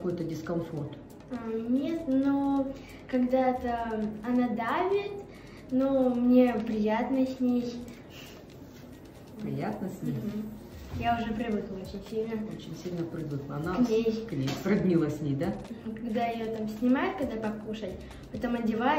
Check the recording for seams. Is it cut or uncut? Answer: uncut